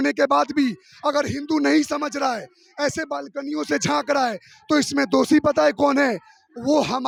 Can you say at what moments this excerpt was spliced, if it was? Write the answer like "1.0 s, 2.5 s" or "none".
none